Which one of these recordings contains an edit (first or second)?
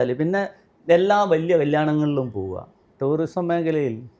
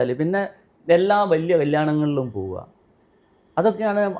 first